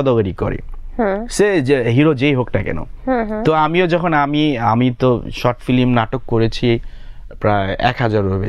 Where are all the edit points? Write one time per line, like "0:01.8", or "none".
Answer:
none